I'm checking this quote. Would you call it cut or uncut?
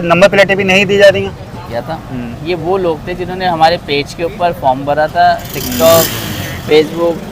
cut